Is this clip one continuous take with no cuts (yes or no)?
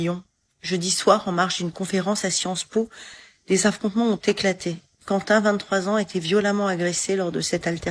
yes